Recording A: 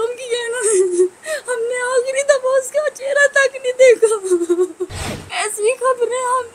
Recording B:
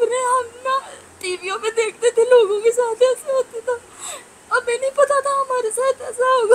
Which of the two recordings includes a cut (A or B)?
A